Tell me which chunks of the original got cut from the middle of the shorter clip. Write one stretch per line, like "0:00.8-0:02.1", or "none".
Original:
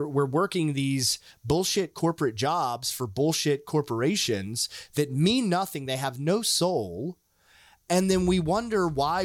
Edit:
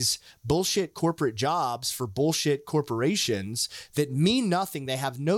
none